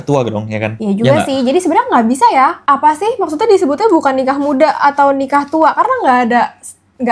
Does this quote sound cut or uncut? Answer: uncut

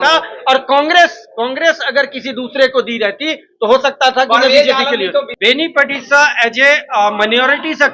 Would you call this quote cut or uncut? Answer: cut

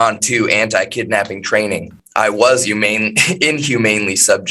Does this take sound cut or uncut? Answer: cut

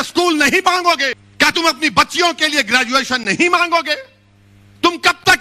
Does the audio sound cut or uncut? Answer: cut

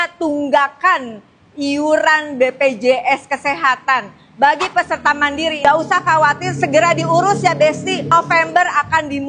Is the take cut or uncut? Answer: cut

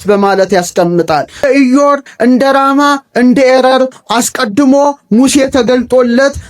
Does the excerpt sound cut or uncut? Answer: cut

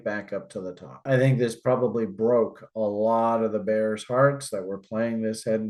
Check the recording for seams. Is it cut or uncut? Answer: uncut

